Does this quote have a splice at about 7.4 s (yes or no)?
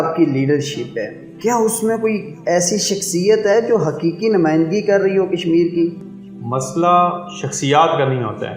no